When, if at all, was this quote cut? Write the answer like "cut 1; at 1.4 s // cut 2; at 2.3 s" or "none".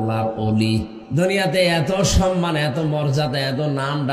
cut 1; at 1.0 s